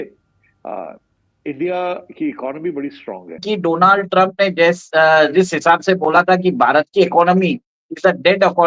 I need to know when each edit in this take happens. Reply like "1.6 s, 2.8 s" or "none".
3.4 s